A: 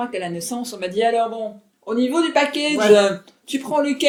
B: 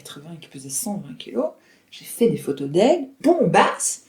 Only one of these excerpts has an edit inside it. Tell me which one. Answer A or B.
B